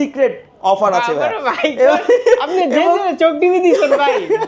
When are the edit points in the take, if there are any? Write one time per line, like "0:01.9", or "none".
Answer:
none

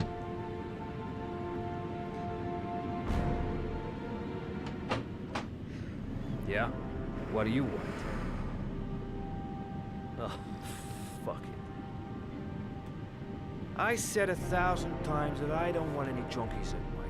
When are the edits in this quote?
0:15.5

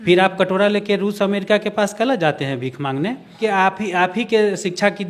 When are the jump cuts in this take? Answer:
none

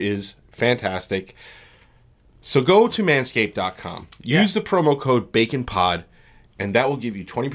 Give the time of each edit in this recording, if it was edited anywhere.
none

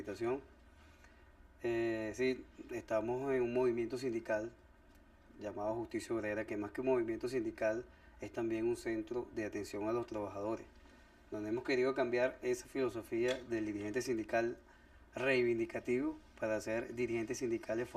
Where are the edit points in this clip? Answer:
0:06.0

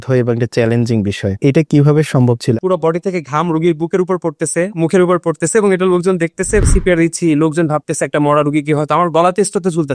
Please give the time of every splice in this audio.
0:01.4
0:02.6
0:06.6

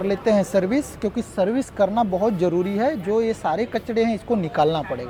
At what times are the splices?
none

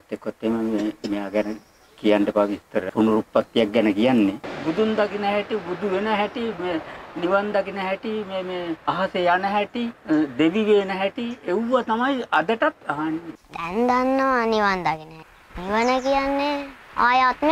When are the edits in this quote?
0:02.8
0:04.5
0:08.8
0:10.0
0:13.2
0:15.2

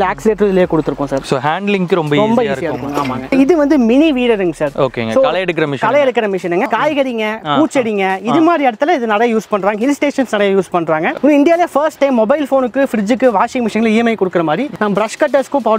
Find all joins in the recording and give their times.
0:03.3
0:06.7
0:11.1
0:14.7

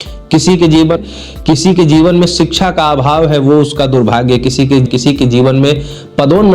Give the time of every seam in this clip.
0:01.0
0:04.9

